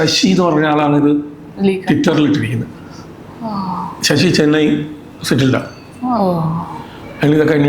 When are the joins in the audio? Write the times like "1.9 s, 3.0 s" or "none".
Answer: none

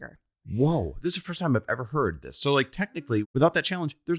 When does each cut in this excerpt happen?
3.2 s

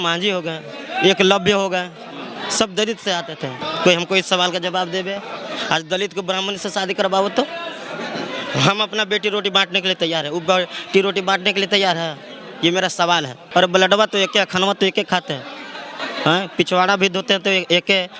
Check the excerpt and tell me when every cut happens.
3.6 s, 13.4 s

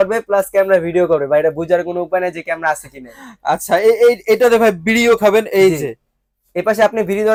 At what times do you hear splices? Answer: none

